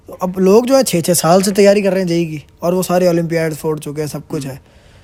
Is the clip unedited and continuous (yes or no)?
yes